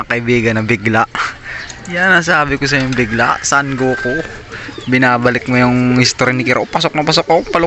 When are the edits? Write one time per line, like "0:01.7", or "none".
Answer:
none